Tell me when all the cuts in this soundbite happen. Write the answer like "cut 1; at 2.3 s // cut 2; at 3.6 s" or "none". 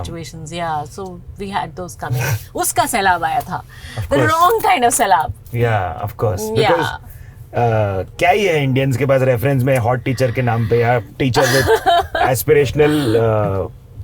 none